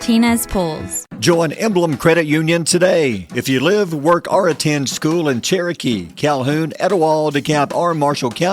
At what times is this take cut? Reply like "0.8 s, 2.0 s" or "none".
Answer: 1.2 s